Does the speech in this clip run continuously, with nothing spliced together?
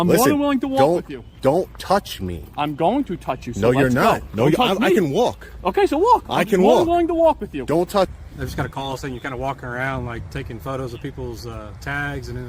no; 1 cut; at 8.1 s

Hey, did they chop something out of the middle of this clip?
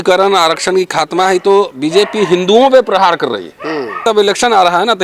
yes; 1 cut; at 4.0 s

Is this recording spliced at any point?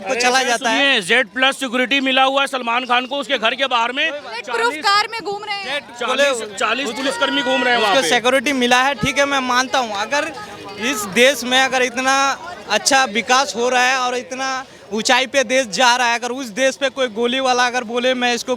no; 0 cuts

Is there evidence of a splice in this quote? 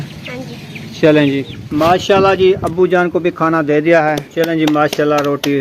yes; 2 cuts; at 1.6 s, 4.2 s

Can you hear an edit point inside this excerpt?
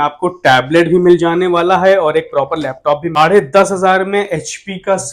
yes; 1 cut; at 3.2 s

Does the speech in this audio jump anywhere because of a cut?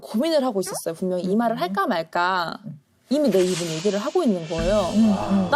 no; 0 cuts

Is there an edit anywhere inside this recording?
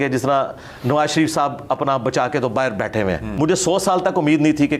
yes; 1 cut; at 3.3 s

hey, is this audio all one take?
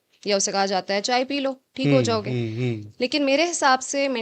yes; 0 cuts

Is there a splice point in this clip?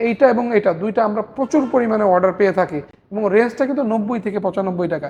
no; 0 cuts

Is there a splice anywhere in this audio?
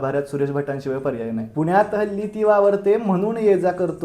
yes; 1 cut; at 1.5 s

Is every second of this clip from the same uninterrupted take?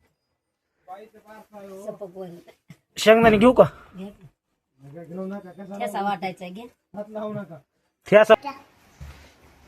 no; 1 cut; at 8.3 s

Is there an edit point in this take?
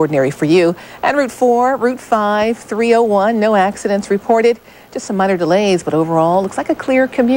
no; 0 cuts

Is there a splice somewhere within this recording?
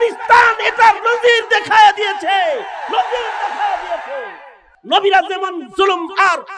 yes; 1 cut; at 4.7 s

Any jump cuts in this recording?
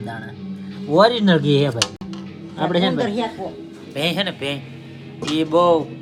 no; 0 cuts

